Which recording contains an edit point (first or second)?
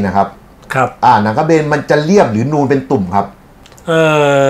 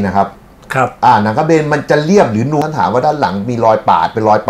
second